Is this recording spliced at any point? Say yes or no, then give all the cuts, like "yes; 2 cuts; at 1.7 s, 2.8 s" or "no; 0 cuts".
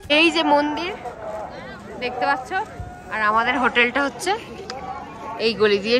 no; 0 cuts